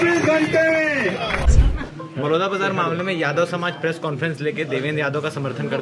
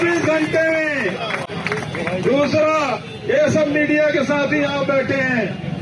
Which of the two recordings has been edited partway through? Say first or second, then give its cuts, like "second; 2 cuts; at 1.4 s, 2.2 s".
first; 1 cut; at 1.5 s